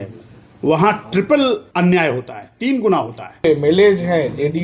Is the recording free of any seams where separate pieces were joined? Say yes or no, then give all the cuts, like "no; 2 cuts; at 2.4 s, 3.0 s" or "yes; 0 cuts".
no; 2 cuts; at 1.7 s, 3.4 s